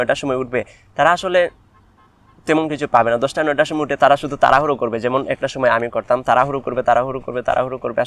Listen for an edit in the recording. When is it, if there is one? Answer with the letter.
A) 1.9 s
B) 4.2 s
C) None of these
C